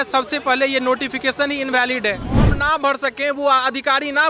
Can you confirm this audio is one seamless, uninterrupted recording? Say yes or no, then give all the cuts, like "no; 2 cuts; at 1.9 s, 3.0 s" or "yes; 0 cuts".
no; 1 cut; at 2.6 s